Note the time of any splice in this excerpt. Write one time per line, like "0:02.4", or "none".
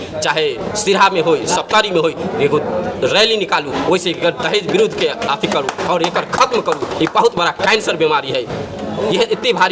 none